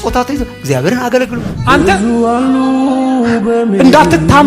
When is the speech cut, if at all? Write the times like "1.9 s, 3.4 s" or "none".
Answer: 1.5 s